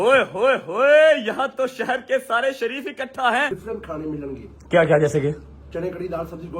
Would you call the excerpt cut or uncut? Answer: cut